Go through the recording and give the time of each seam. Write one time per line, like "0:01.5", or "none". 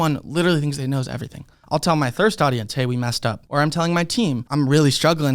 0:01.6
0:03.4
0:04.4